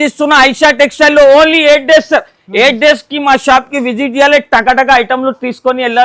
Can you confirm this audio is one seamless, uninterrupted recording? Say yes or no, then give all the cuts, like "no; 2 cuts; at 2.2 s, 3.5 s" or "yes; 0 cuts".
yes; 0 cuts